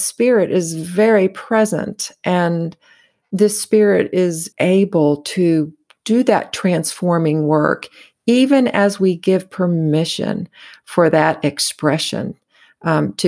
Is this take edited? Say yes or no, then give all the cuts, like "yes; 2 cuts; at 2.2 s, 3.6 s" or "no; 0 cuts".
yes; 1 cut; at 4.5 s